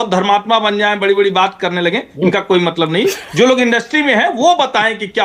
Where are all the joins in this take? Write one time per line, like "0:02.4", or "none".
none

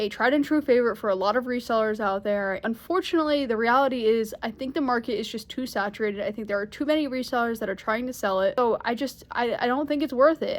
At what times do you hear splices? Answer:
0:02.6
0:08.6

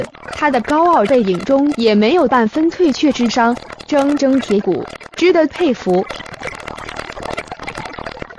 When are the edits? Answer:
0:06.1

